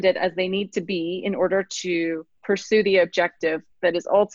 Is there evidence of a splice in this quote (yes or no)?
yes